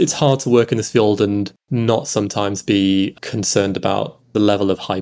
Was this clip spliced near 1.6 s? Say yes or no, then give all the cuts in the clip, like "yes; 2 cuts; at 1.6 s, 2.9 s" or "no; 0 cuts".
yes; 3 cuts; at 1.6 s, 3.1 s, 4.3 s